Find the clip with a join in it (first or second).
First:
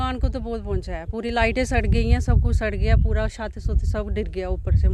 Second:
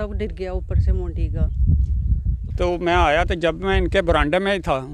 second